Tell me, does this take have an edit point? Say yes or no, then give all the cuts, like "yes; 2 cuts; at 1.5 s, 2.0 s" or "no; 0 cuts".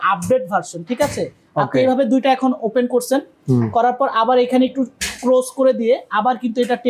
no; 0 cuts